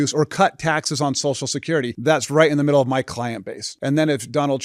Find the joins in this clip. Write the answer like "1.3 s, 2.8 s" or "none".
1.9 s, 3.6 s